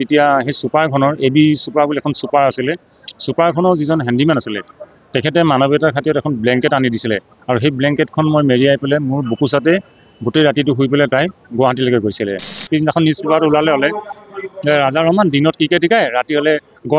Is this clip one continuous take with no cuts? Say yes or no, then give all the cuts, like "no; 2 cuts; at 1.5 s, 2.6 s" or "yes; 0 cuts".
no; 1 cut; at 12.6 s